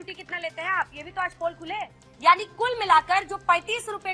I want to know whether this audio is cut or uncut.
cut